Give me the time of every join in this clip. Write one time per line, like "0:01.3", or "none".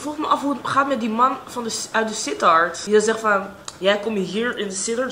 0:02.8